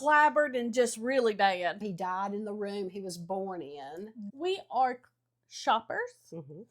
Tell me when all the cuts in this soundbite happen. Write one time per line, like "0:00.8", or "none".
0:01.8
0:04.3